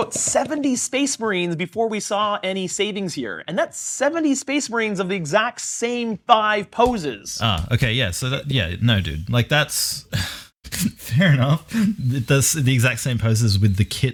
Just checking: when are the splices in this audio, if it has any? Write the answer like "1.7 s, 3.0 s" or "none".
none